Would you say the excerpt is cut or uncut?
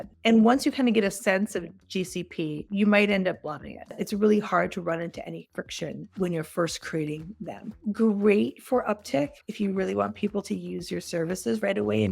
cut